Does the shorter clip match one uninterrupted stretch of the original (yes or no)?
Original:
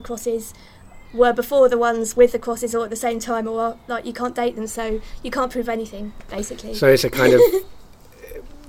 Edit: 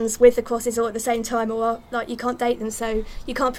yes